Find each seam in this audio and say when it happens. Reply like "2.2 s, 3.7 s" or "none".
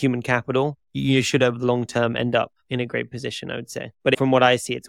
2.6 s, 3.9 s